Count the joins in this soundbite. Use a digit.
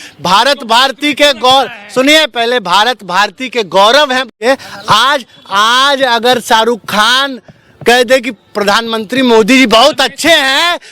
1